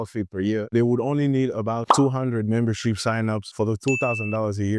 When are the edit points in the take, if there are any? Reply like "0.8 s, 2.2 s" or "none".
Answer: 3.5 s